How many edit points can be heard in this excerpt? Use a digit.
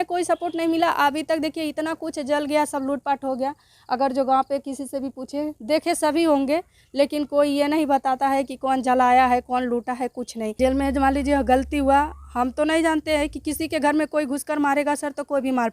1